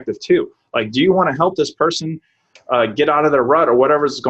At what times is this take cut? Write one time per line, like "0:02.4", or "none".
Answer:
none